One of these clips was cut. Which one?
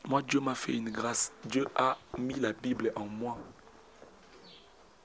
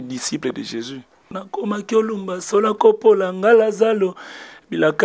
second; 1 cut; at 1.3 s

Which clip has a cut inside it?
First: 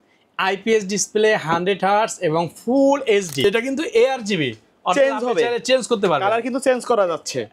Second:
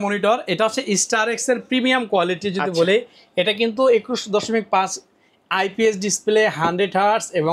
first; 1 cut; at 3.3 s

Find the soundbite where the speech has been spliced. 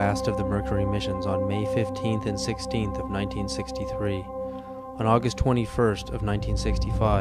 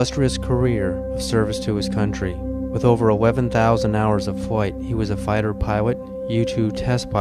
first; 1 cut; at 5.0 s

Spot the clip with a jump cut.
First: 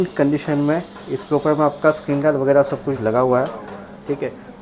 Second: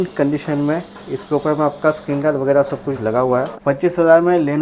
second; 1 cut; at 3.5 s

